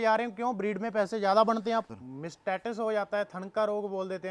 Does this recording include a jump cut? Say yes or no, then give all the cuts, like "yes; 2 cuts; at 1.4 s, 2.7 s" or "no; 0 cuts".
yes; 1 cut; at 1.9 s